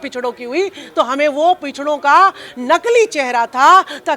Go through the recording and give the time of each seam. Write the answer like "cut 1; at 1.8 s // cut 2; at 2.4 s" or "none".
none